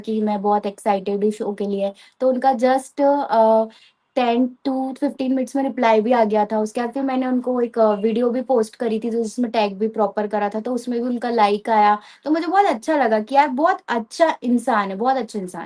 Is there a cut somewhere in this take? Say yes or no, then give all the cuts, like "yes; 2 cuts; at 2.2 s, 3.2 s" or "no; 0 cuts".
no; 0 cuts